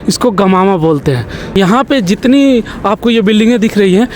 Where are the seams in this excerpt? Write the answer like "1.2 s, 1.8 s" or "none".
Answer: 1.6 s